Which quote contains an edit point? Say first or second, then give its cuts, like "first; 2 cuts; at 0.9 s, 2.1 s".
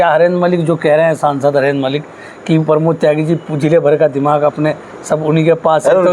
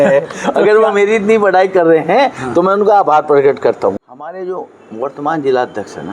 second; 1 cut; at 4.1 s